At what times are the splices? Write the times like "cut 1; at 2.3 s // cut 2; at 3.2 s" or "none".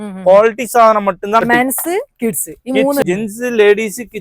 cut 1; at 1.4 s // cut 2; at 3.1 s

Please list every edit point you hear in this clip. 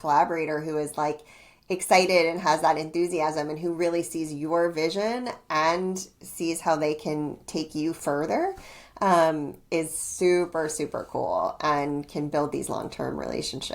none

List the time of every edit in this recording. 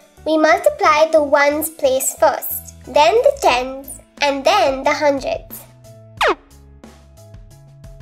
cut 1; at 6.7 s

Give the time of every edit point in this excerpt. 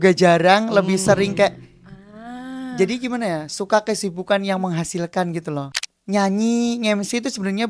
cut 1; at 5.6 s

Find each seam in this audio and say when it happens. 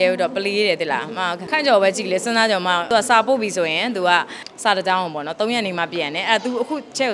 cut 1; at 1.4 s // cut 2; at 2.9 s // cut 3; at 4.4 s

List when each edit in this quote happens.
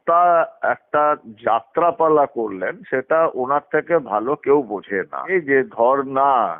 cut 1; at 5.3 s

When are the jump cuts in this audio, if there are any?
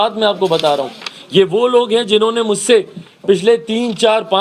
none

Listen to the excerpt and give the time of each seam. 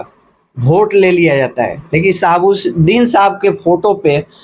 none

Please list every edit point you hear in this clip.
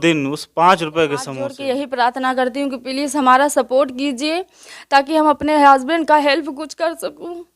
cut 1; at 1.5 s

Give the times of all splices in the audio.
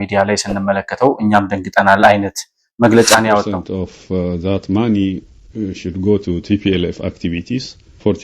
cut 1; at 3.6 s

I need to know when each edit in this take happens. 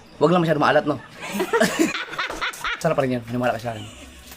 cut 1; at 2.8 s

